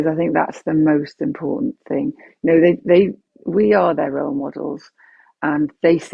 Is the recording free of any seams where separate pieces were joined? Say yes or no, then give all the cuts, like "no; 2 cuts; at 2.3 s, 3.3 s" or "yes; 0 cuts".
yes; 0 cuts